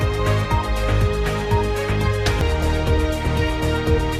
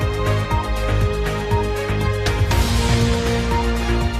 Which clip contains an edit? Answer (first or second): second